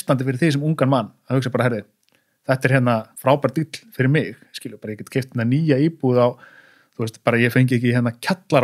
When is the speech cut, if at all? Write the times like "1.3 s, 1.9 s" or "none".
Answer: 3.1 s